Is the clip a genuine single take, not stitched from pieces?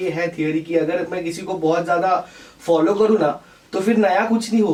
yes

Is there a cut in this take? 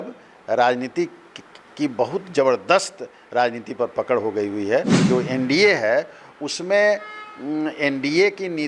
yes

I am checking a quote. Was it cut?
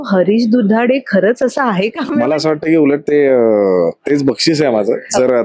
yes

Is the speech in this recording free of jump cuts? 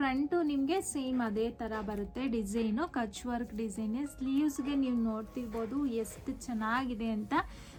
yes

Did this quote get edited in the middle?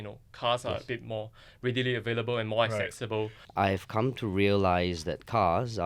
yes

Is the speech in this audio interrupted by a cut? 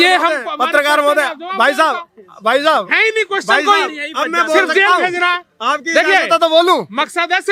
no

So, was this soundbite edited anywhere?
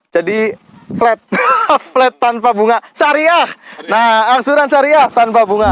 no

